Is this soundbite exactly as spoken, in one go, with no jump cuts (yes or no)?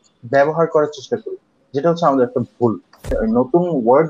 no